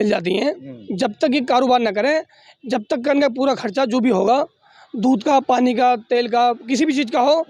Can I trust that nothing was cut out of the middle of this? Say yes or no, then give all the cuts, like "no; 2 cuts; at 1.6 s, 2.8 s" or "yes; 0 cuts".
yes; 0 cuts